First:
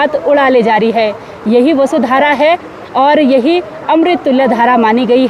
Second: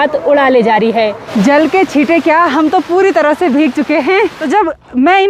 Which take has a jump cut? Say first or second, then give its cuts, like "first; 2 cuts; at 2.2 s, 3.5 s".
second; 2 cuts; at 1.2 s, 4.4 s